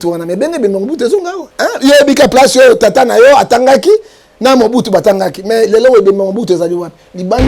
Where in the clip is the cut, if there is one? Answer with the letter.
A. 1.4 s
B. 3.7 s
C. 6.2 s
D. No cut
A